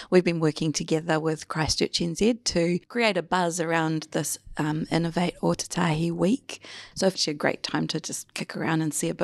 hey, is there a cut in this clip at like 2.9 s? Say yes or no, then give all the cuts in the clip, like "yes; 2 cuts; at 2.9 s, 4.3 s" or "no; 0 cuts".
yes; 2 cuts; at 2.9 s, 6.8 s